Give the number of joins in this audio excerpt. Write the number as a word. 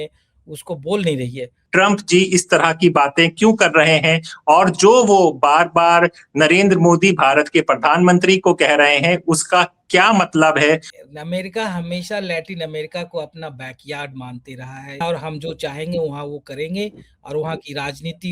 three